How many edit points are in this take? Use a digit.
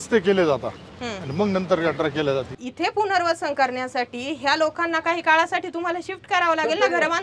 1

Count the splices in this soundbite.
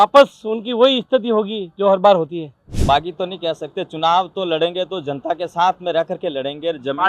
1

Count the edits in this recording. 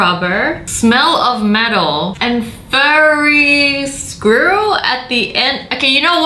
0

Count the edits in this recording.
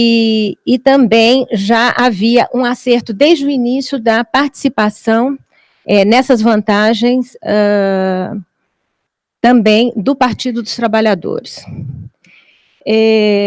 0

